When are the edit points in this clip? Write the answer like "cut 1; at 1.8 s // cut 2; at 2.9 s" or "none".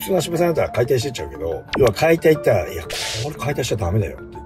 cut 1; at 1.6 s